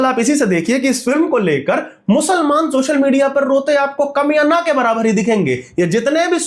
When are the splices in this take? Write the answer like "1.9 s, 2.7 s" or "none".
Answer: none